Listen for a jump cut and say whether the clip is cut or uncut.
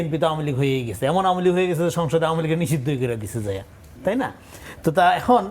uncut